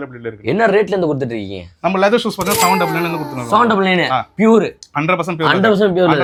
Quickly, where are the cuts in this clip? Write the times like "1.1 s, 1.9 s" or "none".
none